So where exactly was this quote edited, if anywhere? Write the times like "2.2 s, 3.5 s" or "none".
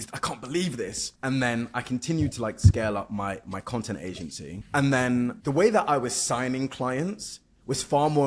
1.1 s, 4.5 s, 5.4 s